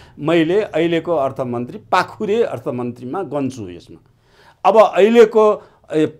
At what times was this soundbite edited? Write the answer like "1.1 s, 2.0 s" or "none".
none